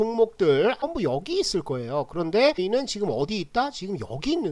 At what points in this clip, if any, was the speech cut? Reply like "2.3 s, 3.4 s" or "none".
0.9 s, 2.6 s